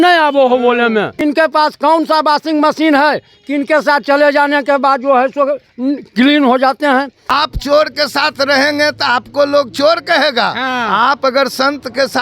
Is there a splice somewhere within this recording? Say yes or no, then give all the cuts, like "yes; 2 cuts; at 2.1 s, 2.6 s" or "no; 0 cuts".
yes; 2 cuts; at 1.2 s, 7.2 s